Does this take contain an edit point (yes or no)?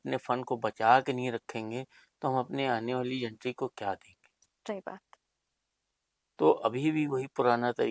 no